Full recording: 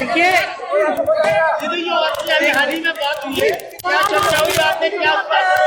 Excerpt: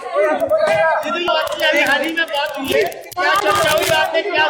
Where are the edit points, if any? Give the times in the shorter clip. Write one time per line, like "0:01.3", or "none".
0:01.2